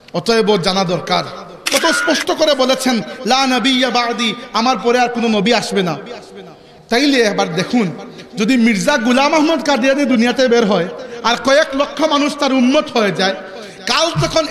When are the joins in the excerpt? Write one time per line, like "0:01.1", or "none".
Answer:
0:01.6